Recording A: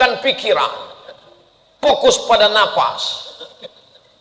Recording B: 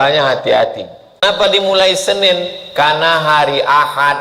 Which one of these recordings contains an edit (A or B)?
B